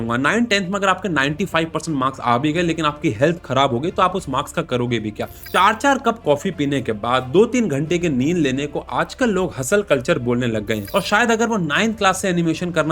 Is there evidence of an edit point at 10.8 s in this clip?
yes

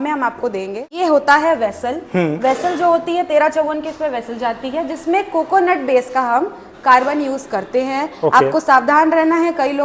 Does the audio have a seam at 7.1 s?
no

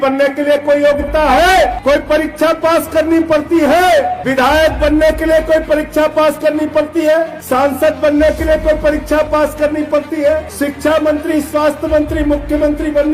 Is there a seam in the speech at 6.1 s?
no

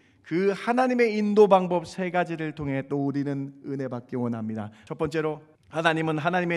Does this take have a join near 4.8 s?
yes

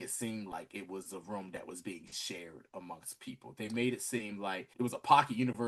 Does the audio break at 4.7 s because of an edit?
yes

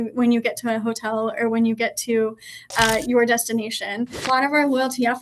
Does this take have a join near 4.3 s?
yes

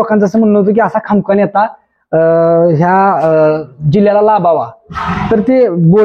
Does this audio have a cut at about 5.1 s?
no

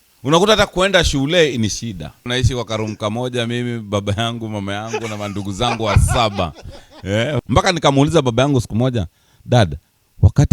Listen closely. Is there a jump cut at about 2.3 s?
yes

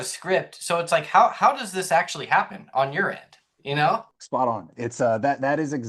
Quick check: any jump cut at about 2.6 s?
no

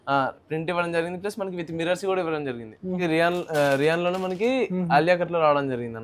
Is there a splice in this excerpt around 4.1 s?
no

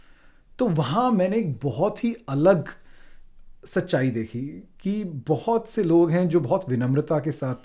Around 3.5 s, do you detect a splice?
no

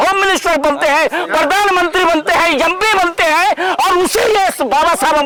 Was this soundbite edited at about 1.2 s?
no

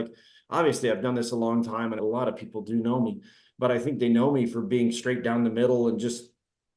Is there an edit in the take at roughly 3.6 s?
no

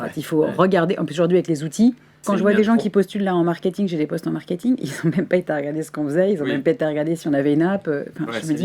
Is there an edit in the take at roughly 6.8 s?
no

